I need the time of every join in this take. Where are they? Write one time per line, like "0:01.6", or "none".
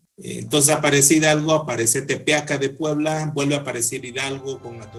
none